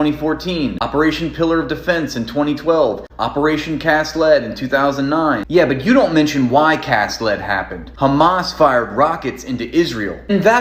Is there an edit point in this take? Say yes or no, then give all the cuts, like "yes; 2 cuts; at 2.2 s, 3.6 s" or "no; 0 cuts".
yes; 1 cut; at 5.2 s